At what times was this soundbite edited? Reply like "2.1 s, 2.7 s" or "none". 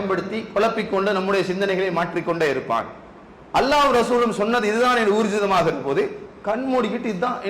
none